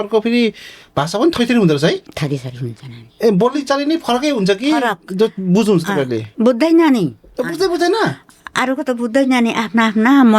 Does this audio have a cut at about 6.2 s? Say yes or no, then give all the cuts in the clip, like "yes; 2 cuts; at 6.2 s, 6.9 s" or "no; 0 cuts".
yes; 1 cut; at 6.2 s